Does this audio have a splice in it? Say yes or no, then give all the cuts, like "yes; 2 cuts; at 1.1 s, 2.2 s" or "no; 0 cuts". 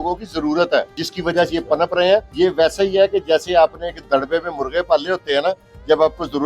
yes; 2 cuts; at 1.0 s, 2.3 s